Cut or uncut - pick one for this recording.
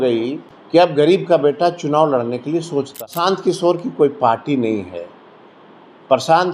cut